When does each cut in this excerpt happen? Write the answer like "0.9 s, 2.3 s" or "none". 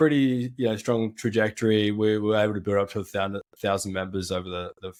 none